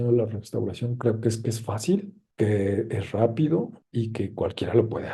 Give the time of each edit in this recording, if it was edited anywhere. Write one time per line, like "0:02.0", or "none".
none